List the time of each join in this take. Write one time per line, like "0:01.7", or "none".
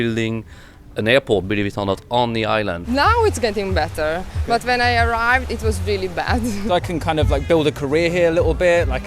0:02.8
0:06.6